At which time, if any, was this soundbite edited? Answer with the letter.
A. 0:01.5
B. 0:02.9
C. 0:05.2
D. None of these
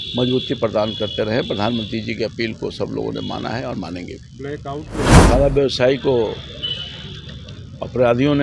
C